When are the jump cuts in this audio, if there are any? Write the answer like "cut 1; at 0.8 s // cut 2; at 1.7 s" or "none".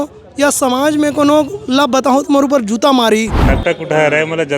cut 1; at 3.4 s